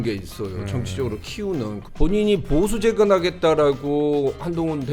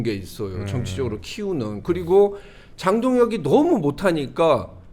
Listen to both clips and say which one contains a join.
first; 1 cut; at 1.7 s

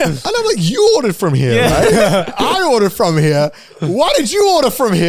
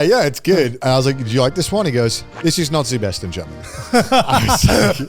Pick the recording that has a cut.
second; 2 cuts; at 0.8 s, 2.3 s

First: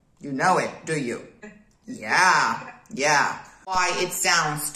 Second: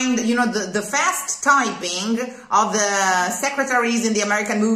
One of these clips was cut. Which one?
first; 1 cut; at 3.7 s

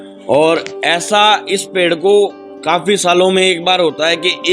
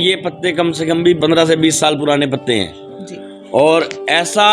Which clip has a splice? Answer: second; 1 cut; at 1.2 s

